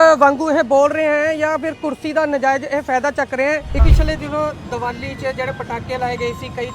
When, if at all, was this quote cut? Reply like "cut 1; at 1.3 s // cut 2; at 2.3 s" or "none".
cut 1; at 3.8 s